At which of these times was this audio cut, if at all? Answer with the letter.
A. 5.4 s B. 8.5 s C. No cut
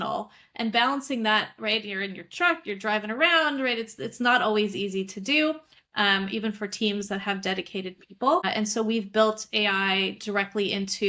B